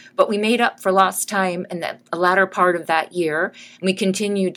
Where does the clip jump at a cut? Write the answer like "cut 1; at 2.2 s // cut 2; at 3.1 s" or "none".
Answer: none